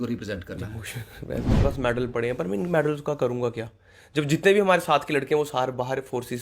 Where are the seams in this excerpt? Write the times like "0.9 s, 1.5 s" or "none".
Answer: 1.6 s